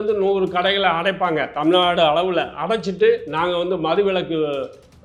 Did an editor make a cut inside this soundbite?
no; 0 cuts

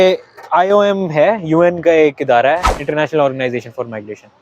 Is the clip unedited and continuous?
no; 1 cut; at 2.7 s

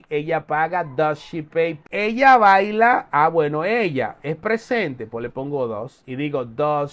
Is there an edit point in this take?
yes; 1 cut; at 1.8 s

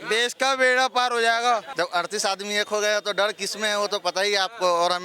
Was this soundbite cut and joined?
yes; 1 cut; at 1.7 s

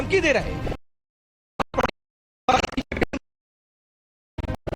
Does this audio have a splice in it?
yes; 1 cut; at 1.7 s

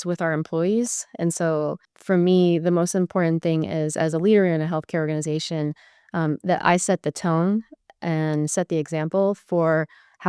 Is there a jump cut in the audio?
yes; 1 cut; at 1.9 s

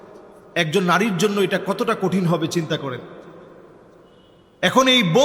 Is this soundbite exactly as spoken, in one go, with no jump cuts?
yes; 0 cuts

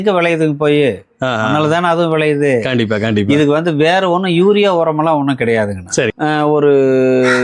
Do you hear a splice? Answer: yes; 1 cut; at 6.1 s

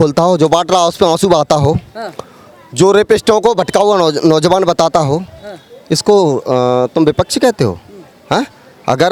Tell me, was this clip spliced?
no; 0 cuts

